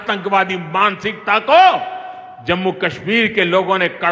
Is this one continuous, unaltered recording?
yes; 0 cuts

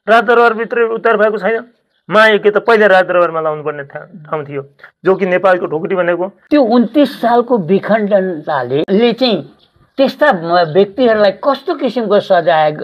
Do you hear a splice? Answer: yes; 2 cuts; at 6.3 s, 8.9 s

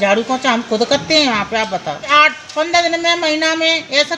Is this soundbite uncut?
no; 1 cut; at 2.1 s

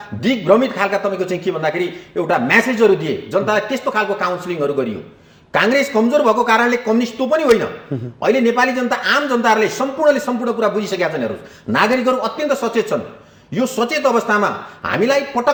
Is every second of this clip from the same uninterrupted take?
yes; 0 cuts

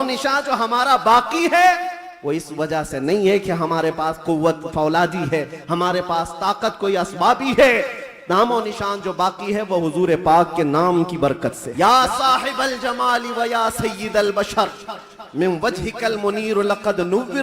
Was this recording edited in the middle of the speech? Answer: yes; 1 cut; at 11.6 s

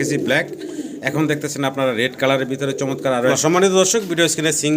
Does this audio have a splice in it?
yes; 1 cut; at 3.3 s

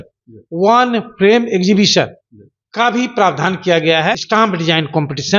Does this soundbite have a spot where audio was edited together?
yes; 1 cut; at 4.2 s

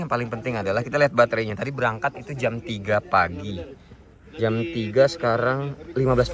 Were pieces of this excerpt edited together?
no; 0 cuts

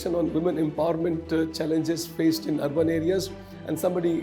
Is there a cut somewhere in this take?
no; 0 cuts

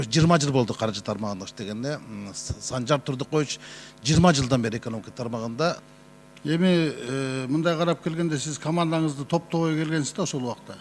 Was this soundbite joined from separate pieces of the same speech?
yes; 1 cut; at 5.9 s

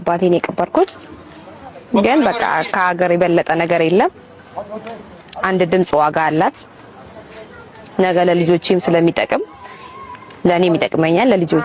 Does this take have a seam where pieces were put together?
no; 0 cuts

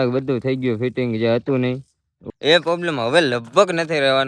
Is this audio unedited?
no; 1 cut; at 2.2 s

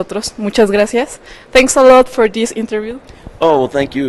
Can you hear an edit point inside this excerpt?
yes; 1 cut; at 2.5 s

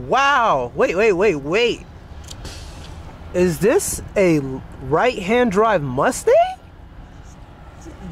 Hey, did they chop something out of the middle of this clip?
no; 0 cuts

